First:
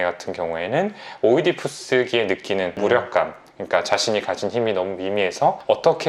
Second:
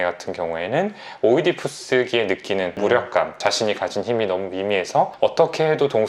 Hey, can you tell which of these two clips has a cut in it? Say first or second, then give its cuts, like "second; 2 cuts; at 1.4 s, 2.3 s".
second; 1 cut; at 3.4 s